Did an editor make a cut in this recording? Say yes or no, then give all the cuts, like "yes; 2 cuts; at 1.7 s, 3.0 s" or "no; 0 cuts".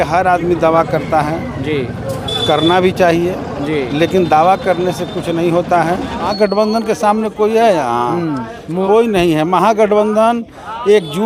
yes; 1 cut; at 6.3 s